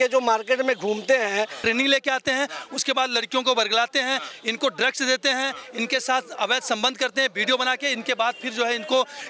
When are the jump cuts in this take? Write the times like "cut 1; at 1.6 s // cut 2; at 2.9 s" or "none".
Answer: cut 1; at 1.6 s